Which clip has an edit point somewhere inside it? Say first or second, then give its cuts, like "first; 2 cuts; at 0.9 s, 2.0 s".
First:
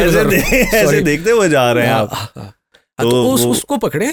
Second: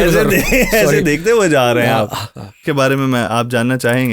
second; 1 cut; at 2.6 s